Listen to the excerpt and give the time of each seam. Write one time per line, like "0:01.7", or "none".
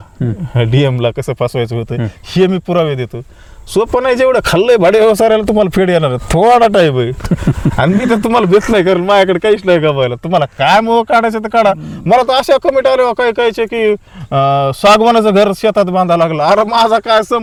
none

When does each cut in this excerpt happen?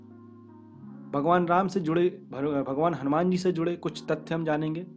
0:01.1

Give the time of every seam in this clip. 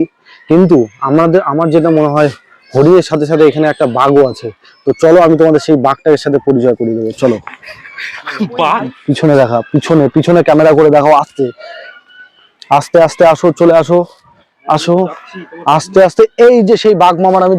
none

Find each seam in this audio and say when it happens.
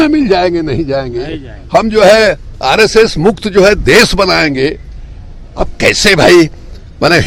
none

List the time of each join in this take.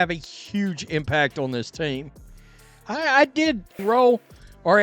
0:03.7

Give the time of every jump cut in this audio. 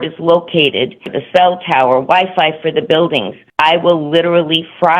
0:01.1
0:03.4

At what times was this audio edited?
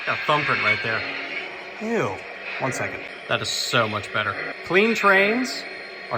0:03.1
0:04.5

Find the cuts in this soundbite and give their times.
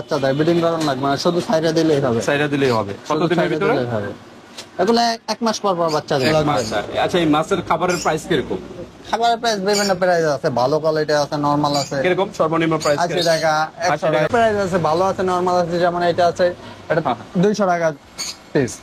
0:06.4
0:14.3

